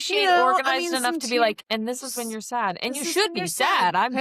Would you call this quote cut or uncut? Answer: uncut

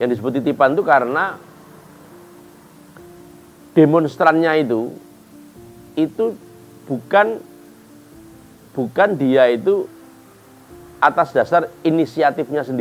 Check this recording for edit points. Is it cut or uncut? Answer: uncut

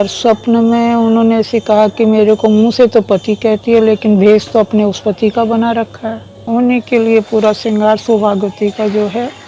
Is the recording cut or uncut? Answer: cut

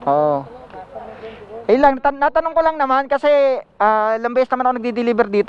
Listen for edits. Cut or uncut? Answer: uncut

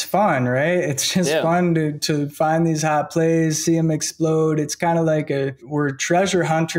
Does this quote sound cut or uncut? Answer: cut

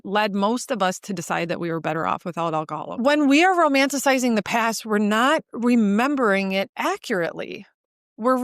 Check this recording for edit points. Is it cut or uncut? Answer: cut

